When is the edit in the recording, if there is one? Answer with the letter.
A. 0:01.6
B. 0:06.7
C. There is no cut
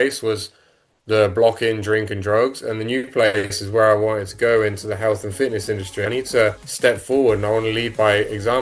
B